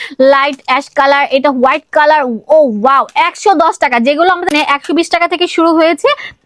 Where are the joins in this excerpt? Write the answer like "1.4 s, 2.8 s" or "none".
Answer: 4.5 s